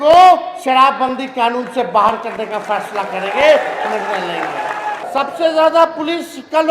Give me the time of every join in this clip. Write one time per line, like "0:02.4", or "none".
0:05.1